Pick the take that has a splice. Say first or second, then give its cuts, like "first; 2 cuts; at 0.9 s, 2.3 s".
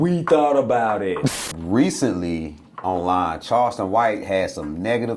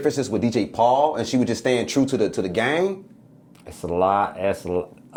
first; 1 cut; at 1.5 s